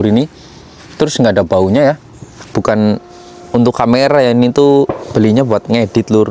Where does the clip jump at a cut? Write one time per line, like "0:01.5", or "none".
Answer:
0:02.5

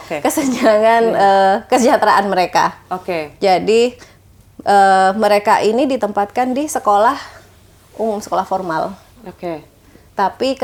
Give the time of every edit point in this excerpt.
none

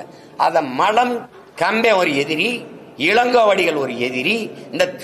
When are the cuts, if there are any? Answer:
0:01.4

